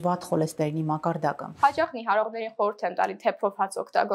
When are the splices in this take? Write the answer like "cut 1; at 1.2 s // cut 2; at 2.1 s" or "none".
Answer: cut 1; at 1.5 s